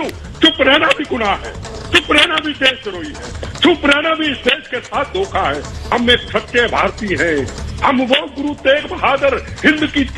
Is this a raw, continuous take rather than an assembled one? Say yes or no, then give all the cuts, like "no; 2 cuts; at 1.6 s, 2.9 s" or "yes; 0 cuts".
no; 1 cut; at 5.7 s